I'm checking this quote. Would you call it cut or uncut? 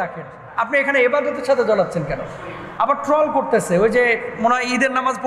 uncut